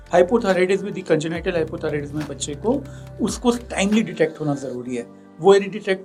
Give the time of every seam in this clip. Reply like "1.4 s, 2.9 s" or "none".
none